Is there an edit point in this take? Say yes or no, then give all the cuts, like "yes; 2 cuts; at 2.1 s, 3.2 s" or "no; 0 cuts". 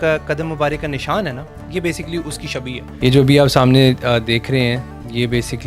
no; 0 cuts